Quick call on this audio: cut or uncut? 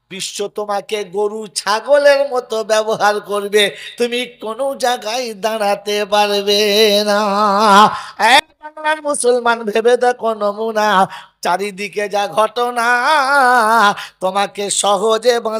uncut